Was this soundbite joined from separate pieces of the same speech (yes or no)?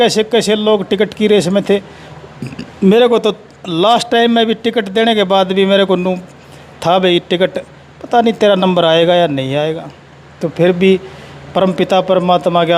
no